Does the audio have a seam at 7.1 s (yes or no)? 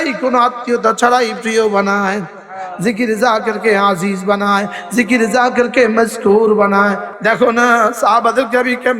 yes